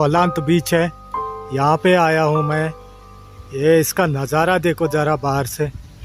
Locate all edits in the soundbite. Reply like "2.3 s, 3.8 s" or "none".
none